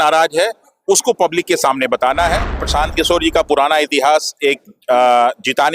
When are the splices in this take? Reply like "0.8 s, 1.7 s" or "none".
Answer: 2.6 s